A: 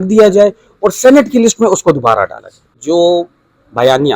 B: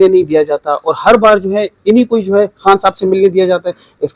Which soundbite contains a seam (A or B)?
A